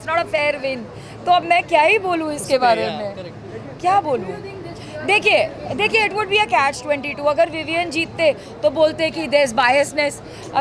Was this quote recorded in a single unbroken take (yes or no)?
yes